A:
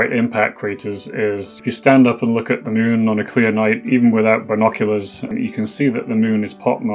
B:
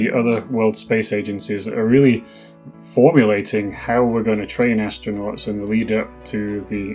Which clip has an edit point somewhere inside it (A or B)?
A